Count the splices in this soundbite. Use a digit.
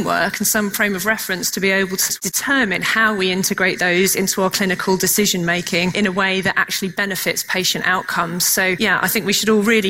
3